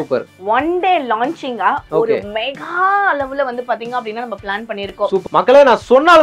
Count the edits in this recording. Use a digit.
1